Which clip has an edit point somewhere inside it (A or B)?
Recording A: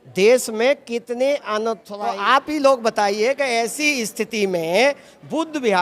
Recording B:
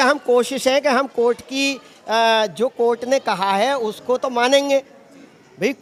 A